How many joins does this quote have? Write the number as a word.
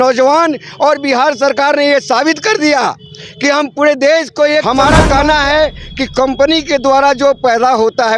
one